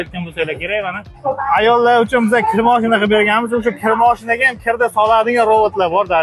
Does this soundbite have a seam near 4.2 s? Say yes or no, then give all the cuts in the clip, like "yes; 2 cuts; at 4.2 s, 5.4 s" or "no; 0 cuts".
no; 1 cut; at 1.1 s